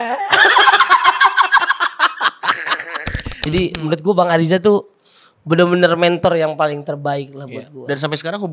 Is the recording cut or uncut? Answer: cut